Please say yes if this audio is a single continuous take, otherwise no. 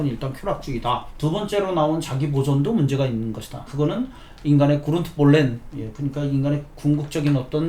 no